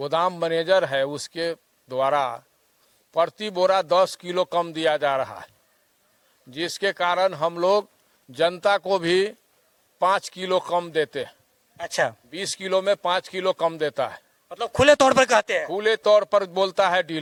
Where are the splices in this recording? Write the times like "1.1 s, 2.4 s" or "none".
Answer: none